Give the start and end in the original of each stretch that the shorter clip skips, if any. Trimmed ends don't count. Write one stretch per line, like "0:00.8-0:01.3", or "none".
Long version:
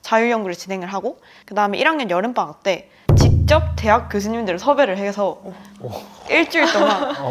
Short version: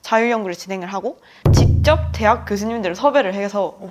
0:01.3-0:02.9